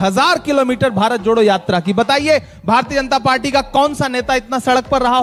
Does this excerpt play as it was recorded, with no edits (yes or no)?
yes